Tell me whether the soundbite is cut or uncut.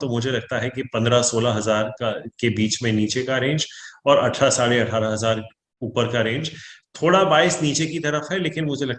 uncut